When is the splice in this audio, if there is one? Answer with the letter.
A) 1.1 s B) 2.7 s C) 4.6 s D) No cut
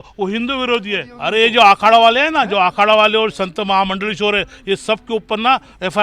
A